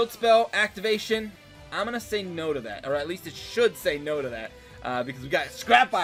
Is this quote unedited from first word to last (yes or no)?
yes